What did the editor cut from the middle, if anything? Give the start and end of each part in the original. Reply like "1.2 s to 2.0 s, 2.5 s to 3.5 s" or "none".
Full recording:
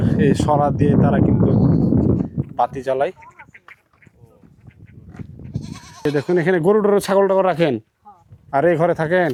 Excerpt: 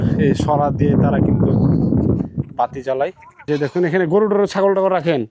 3.3 s to 5.8 s